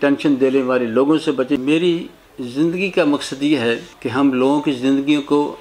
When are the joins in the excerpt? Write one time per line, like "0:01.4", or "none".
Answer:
0:01.6